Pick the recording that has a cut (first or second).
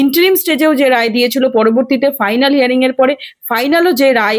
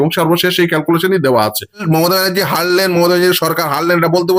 second